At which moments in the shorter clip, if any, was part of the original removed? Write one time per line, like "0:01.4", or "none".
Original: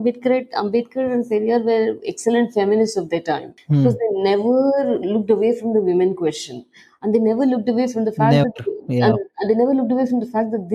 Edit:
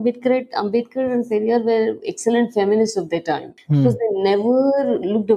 none